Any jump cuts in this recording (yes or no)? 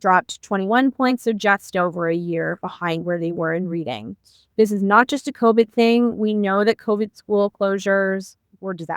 yes